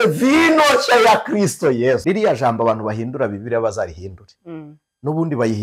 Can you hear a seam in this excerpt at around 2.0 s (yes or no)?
yes